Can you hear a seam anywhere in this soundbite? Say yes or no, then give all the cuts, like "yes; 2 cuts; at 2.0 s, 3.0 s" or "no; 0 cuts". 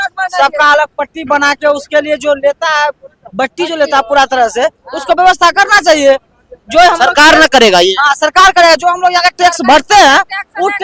no; 0 cuts